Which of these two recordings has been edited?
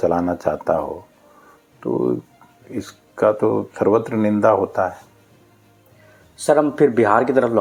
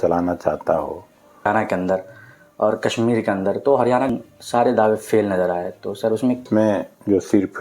second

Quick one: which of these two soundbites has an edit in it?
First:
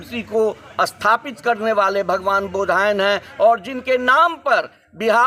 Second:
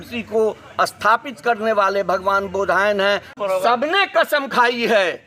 second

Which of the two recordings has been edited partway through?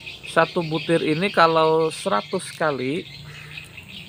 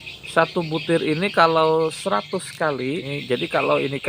second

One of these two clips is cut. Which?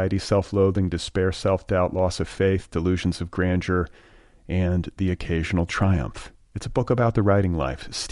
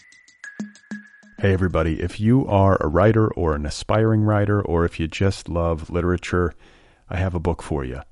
second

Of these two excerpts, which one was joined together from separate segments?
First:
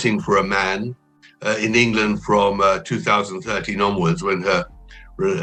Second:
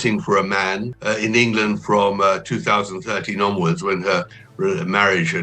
second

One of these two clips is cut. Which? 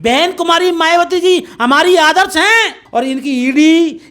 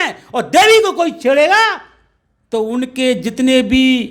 first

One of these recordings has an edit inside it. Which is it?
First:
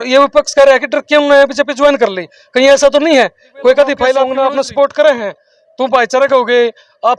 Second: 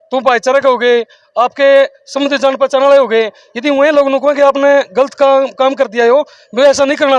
first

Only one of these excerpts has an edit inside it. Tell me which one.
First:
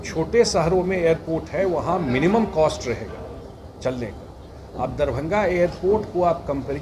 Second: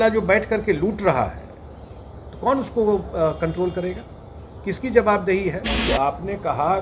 second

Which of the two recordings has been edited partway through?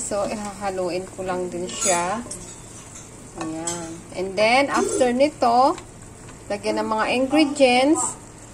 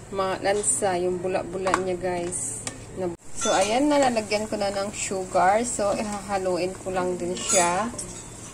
second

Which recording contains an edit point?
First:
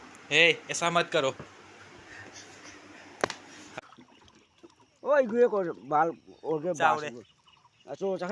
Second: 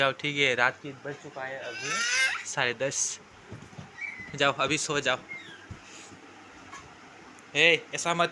first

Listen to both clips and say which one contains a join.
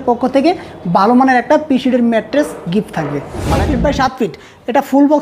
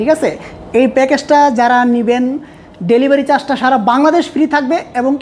first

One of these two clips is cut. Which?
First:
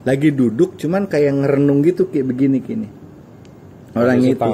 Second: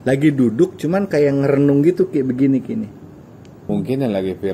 second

